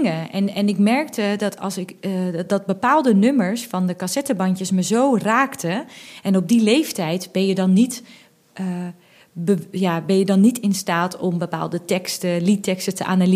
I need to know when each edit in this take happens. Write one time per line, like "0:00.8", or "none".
none